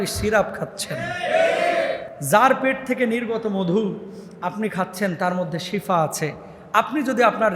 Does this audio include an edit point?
yes; 1 cut; at 2.1 s

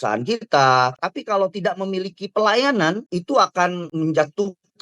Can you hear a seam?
yes; 3 cuts; at 1.1 s, 3.0 s, 3.8 s

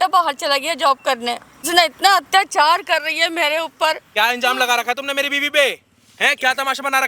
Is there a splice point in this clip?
yes; 2 cuts; at 1.7 s, 4.1 s

